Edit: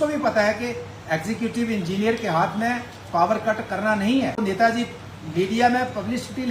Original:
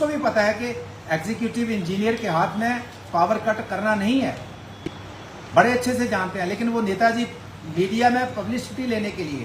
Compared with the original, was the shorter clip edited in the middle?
yes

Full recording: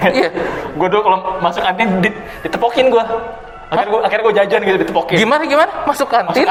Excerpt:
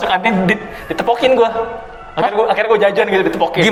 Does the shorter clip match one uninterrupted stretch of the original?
yes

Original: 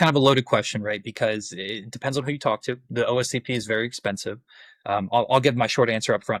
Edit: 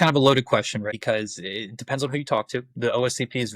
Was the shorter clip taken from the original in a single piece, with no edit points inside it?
no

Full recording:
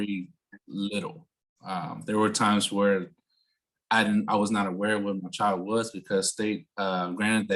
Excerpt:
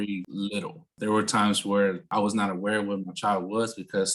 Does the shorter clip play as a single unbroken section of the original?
no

